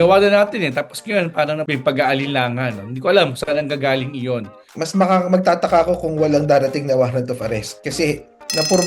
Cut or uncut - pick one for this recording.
cut